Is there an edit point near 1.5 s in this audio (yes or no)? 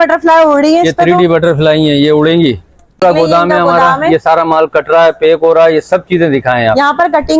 no